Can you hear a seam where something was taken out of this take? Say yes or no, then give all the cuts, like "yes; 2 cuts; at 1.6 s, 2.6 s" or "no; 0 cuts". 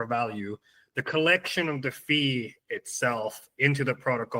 no; 0 cuts